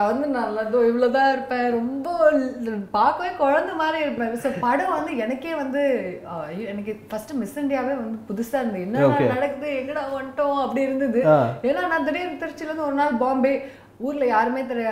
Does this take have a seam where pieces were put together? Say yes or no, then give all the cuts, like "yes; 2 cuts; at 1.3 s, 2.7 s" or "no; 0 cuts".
no; 0 cuts